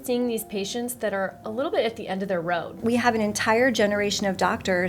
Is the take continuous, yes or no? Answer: no